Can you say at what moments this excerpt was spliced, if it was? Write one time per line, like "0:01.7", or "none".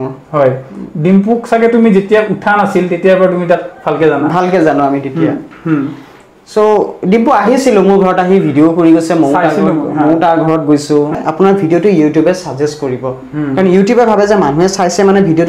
0:11.1

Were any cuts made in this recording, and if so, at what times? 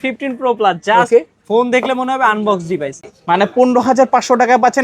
0:03.0

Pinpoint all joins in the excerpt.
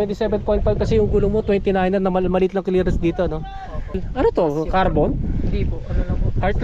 0:04.0

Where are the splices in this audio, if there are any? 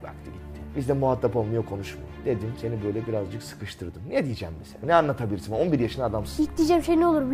0:04.6

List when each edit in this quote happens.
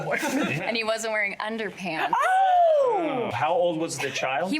0:03.3

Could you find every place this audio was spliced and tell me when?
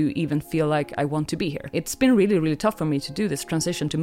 0:01.6

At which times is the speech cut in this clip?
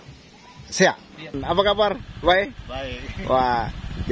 0:01.4

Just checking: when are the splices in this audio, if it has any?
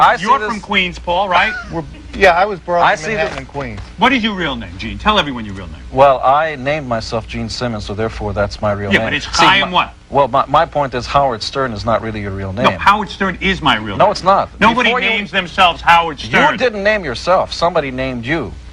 0:15.0

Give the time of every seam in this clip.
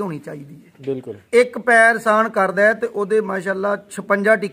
0:01.2

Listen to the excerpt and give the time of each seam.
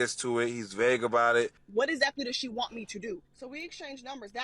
0:01.6

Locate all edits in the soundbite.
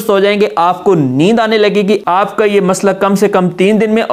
0:02.0

